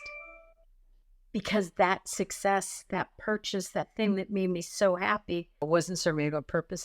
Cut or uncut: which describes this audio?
cut